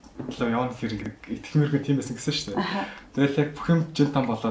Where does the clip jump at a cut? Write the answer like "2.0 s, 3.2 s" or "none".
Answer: 1.1 s